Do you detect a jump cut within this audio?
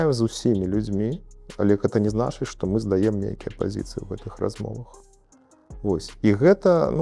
no; 0 cuts

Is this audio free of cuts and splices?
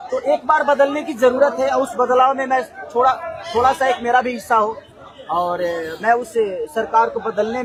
yes; 0 cuts

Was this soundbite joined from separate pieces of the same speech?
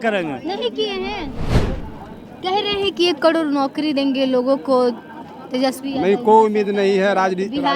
yes; 1 cut; at 1.8 s

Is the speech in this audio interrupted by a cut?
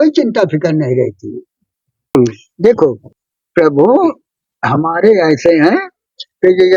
yes; 1 cut; at 2.2 s

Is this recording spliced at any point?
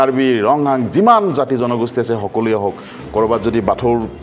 no; 0 cuts

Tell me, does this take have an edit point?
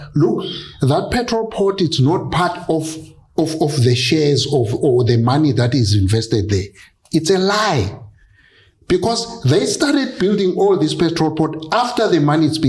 no; 0 cuts

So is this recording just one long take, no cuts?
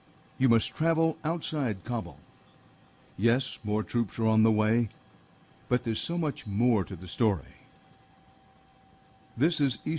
yes; 0 cuts

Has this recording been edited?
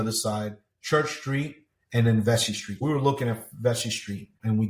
yes; 1 cut; at 2.7 s

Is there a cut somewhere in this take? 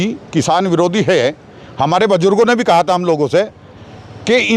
no; 0 cuts

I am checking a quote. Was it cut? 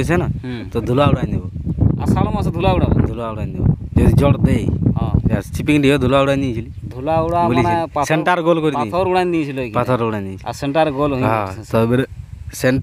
yes; 1 cut; at 5.4 s

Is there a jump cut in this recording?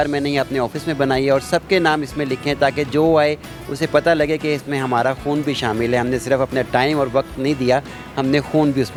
no; 0 cuts

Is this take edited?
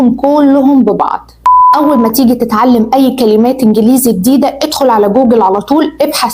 yes; 1 cut; at 1.5 s

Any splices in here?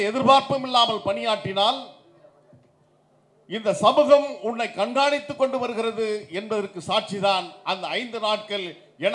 no; 0 cuts

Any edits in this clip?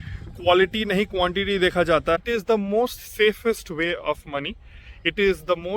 yes; 1 cut; at 2.2 s

